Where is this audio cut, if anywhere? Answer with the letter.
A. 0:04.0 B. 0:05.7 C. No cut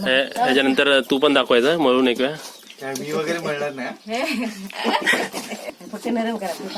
B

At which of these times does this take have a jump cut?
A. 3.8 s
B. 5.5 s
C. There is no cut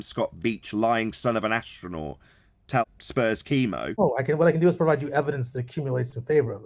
A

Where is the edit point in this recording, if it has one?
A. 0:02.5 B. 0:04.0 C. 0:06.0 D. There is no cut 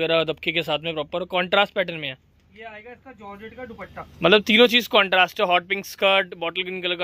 D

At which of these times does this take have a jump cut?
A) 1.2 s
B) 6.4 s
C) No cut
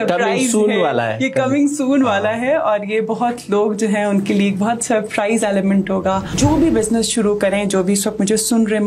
B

